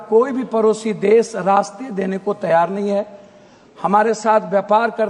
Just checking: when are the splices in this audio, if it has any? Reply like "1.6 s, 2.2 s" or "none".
none